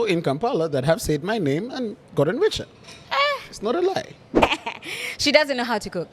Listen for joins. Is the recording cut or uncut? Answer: cut